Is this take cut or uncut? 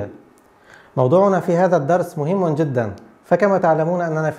cut